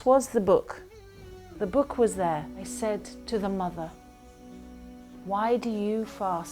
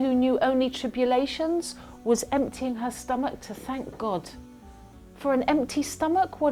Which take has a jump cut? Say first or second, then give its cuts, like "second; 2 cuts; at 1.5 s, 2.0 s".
first; 1 cut; at 2.6 s